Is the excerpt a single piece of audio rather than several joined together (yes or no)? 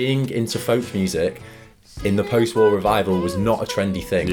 yes